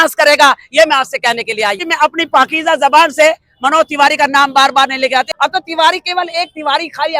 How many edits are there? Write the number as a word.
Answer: two